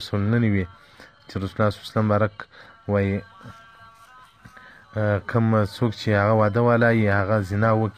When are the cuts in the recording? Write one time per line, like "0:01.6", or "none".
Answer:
0:06.4